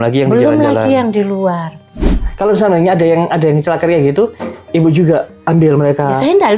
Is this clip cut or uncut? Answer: cut